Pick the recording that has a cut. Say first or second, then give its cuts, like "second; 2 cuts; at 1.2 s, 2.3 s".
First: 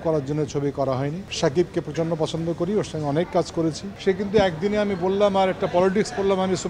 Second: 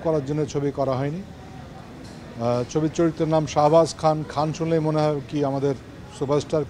first; 2 cuts; at 1.3 s, 3.9 s